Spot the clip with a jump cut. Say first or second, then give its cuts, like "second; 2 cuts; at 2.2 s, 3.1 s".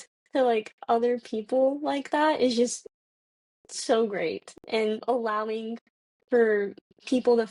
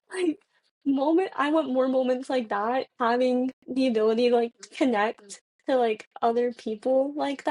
second; 1 cut; at 2.9 s